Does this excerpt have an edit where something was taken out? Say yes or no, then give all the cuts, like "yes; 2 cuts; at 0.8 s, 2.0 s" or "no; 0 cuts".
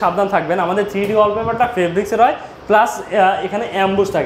no; 0 cuts